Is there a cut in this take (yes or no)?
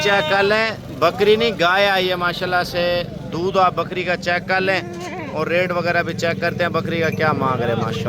no